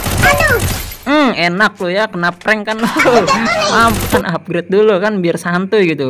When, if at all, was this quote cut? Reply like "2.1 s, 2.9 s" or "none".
4.2 s